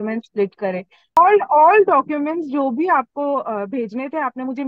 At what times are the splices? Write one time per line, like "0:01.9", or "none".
0:01.2